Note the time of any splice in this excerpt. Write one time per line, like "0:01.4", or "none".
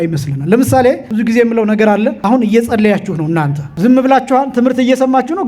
0:01.1
0:02.2
0:03.6